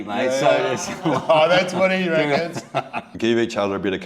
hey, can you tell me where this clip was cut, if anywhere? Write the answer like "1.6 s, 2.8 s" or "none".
3.0 s